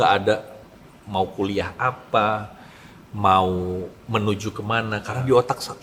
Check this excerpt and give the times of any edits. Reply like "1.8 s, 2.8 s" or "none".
none